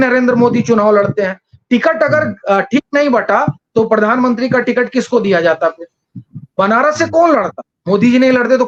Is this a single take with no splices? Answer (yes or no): yes